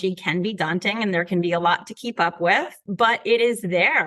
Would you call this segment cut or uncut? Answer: cut